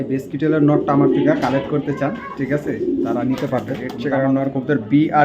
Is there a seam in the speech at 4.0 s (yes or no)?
yes